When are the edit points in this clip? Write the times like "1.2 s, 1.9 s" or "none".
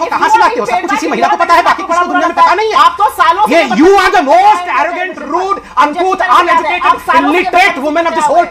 none